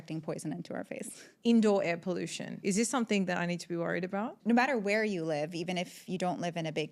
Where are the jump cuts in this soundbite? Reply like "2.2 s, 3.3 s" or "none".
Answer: 1.2 s, 2.6 s, 4.4 s